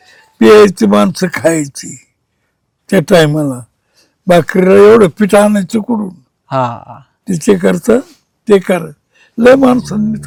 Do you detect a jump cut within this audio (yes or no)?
no